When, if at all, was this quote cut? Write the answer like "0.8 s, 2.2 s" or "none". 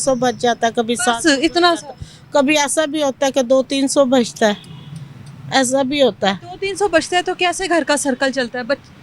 none